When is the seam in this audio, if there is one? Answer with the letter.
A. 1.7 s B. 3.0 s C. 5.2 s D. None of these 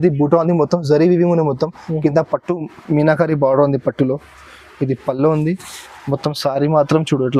D